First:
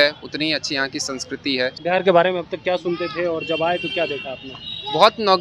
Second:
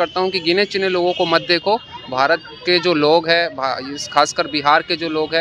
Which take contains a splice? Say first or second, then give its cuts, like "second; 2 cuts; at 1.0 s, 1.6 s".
first; 1 cut; at 1.8 s